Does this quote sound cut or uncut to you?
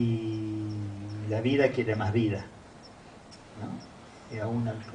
uncut